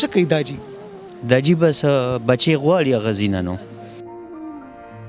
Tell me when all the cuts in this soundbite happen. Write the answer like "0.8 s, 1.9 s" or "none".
3.7 s